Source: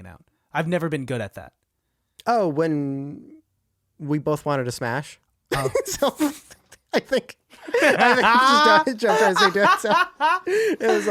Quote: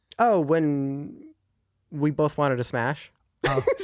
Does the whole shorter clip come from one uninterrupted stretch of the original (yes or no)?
yes